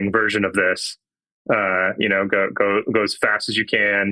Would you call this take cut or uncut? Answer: uncut